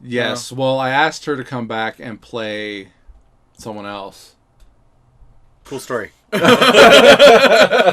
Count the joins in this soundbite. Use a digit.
1